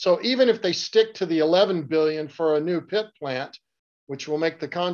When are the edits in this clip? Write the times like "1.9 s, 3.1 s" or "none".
none